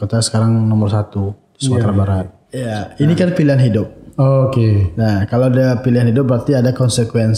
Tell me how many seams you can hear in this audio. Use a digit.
1